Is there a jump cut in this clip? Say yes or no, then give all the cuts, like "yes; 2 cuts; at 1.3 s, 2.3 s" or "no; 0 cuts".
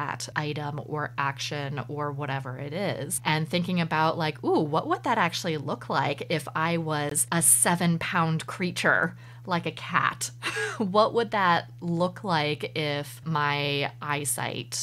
no; 0 cuts